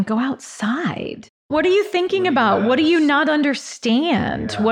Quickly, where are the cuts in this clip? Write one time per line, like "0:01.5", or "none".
0:01.3